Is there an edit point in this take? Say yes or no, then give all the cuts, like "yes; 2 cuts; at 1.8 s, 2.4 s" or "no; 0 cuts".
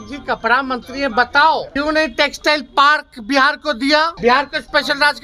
yes; 2 cuts; at 1.7 s, 4.1 s